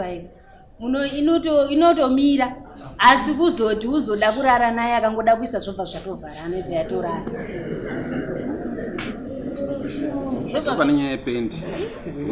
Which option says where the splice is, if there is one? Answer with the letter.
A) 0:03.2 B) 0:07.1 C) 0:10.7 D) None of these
C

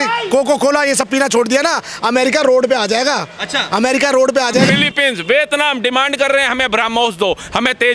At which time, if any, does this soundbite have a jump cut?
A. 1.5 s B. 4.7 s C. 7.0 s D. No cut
B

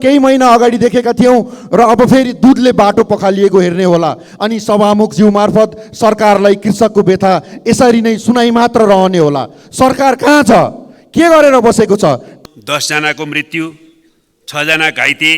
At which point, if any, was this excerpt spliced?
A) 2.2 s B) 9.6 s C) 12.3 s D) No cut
C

